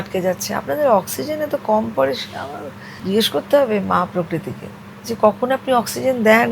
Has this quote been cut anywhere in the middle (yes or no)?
no